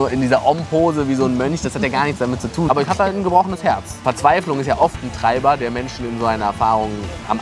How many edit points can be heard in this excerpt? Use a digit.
2